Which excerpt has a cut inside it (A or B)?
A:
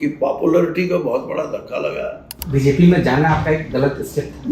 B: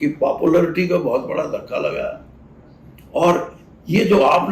A